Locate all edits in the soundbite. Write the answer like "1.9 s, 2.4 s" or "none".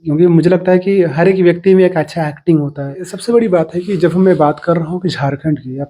3.1 s